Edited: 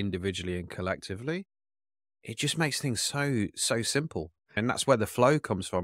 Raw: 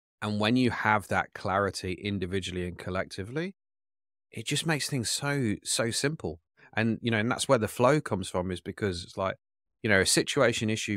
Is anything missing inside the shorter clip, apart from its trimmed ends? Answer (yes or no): yes